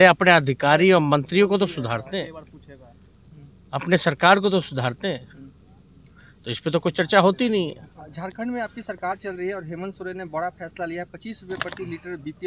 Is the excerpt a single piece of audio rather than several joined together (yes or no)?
yes